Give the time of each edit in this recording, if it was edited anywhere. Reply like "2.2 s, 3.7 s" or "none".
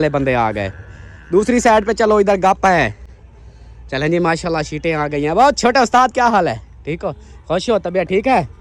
none